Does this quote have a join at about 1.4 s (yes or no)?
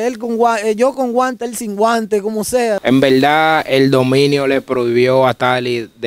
no